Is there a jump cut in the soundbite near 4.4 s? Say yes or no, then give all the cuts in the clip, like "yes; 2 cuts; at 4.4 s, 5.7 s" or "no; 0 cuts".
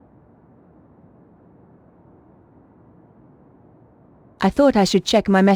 yes; 1 cut; at 4.4 s